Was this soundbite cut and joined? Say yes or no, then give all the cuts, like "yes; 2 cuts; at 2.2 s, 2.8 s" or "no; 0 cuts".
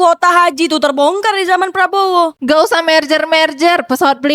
yes; 1 cut; at 2.4 s